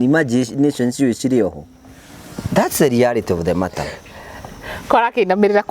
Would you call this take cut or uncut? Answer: uncut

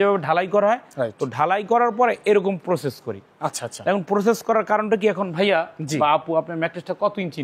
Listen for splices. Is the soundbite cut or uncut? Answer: uncut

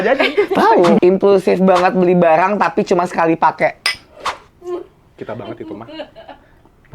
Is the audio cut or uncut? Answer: cut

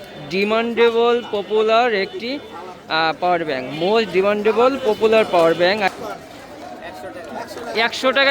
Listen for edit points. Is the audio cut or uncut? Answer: cut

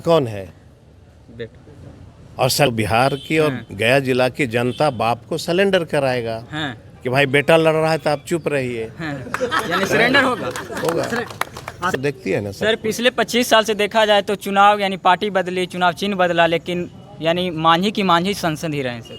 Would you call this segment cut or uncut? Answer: cut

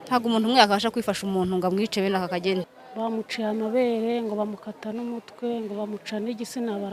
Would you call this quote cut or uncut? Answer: cut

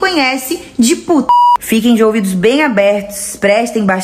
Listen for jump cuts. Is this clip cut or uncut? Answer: cut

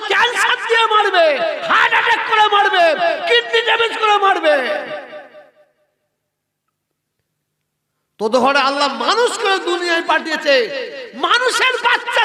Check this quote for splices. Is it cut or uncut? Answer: uncut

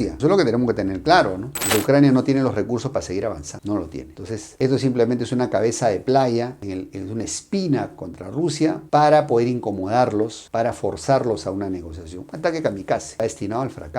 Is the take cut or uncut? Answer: cut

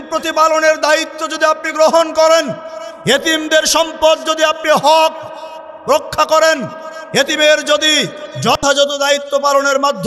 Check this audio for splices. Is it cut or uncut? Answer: uncut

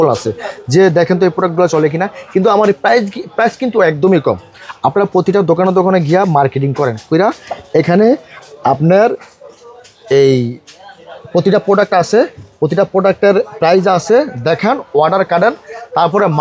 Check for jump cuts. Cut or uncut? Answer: uncut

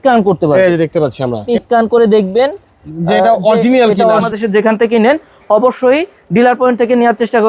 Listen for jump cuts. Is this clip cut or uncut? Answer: cut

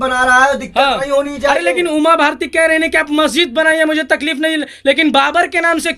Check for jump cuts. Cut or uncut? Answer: uncut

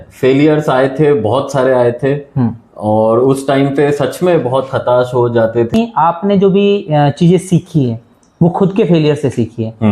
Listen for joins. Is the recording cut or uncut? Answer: cut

